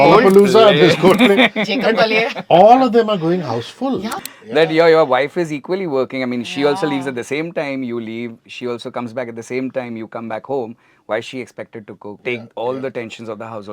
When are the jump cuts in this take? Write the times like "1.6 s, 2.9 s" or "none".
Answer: 4.2 s, 12.2 s